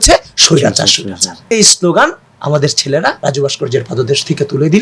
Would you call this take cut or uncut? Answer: cut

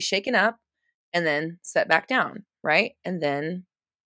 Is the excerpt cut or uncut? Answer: uncut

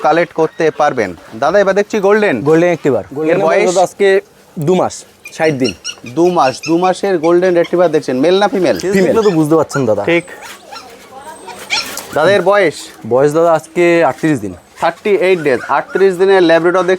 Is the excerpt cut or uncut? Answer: cut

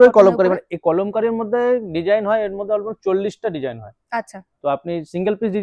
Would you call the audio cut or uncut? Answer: uncut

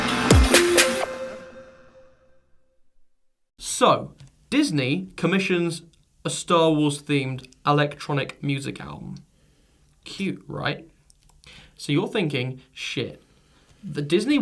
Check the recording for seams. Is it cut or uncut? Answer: cut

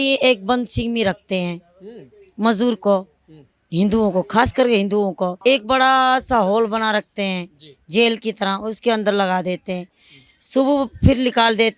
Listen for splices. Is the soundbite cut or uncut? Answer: cut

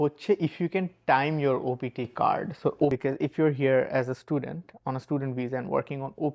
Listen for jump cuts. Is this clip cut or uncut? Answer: cut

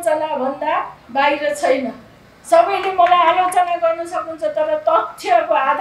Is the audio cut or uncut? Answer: uncut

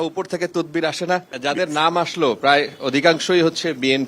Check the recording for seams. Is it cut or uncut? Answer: cut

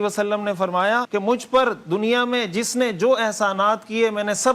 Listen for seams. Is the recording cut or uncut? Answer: cut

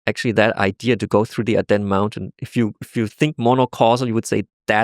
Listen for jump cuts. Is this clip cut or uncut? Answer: uncut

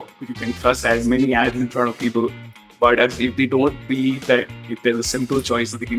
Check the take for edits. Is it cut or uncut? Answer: uncut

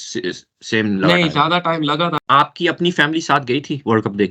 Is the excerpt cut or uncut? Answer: cut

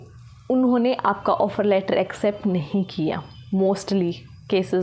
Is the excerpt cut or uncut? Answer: uncut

